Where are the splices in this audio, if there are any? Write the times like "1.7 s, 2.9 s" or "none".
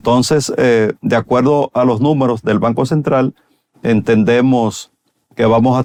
none